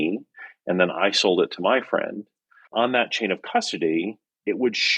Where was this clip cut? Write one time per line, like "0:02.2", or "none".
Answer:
none